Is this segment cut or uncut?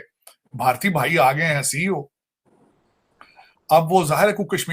uncut